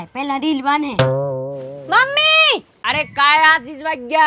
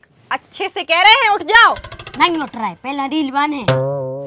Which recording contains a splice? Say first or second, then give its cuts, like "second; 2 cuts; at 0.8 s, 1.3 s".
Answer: first; 1 cut; at 2.7 s